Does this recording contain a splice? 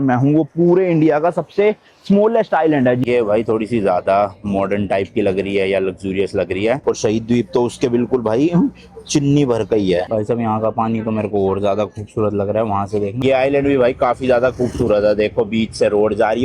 yes; 4 cuts; at 3.0 s, 6.8 s, 10.1 s, 13.2 s

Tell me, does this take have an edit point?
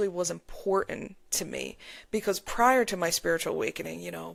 no; 0 cuts

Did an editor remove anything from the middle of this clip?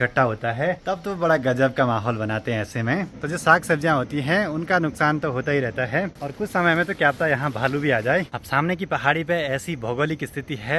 yes; 4 cuts; at 0.8 s, 3.1 s, 6.2 s, 8.4 s

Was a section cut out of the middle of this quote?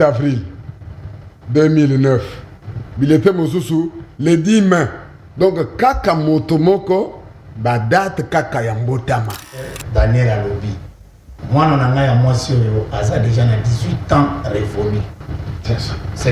yes; 1 cut; at 9.7 s

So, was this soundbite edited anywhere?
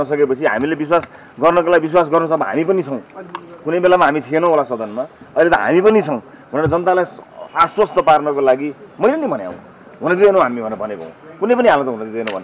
no; 0 cuts

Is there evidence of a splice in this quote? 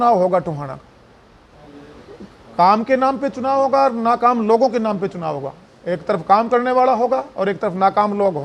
no; 0 cuts

